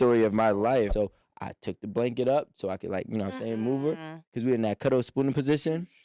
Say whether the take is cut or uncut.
cut